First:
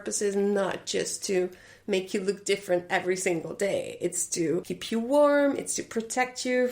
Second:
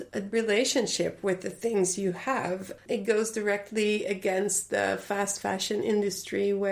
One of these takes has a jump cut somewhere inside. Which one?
first; 1 cut; at 4.7 s

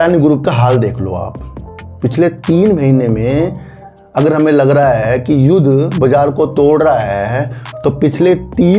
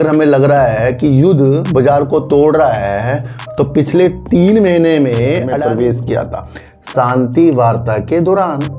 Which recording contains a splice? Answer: second; 1 cut; at 5.5 s

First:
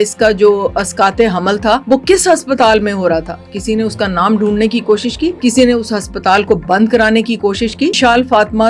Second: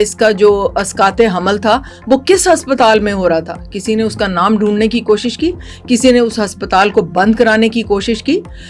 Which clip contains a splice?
first; 3 cuts; at 1.8 s, 5.4 s, 8.0 s

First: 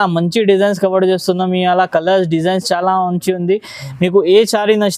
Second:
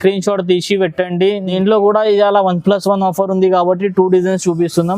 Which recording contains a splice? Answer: second; 1 cut; at 1.5 s

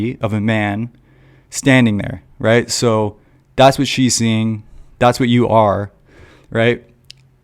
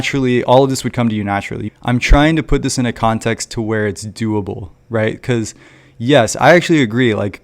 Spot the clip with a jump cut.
second; 1 cut; at 1.6 s

